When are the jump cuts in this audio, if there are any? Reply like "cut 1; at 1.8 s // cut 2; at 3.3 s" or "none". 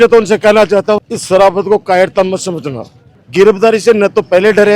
cut 1; at 3.2 s